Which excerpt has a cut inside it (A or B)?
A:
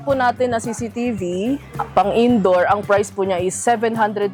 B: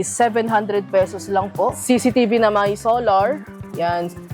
B